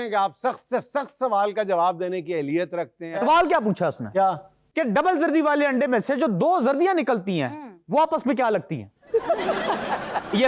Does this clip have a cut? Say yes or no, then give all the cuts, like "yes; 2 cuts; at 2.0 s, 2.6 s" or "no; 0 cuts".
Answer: yes; 1 cut; at 3.1 s